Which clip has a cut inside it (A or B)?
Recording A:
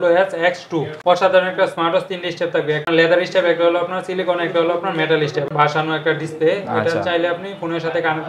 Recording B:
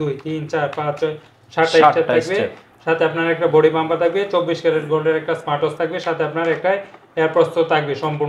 A